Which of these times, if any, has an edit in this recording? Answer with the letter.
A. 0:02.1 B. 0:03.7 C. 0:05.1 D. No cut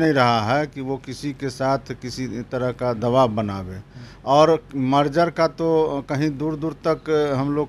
D